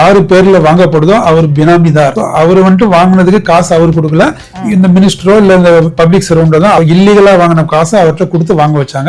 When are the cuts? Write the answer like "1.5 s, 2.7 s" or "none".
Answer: 2.1 s, 6.8 s